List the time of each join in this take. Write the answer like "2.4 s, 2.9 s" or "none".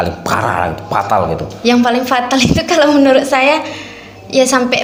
none